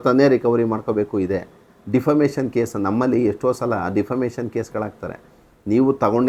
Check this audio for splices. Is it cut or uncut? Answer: uncut